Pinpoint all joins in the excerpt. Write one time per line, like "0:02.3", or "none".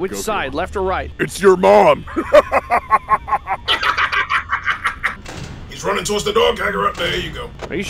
0:05.1